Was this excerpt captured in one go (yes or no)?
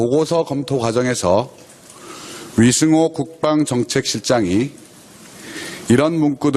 no